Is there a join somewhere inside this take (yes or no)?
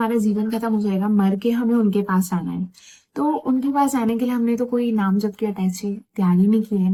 no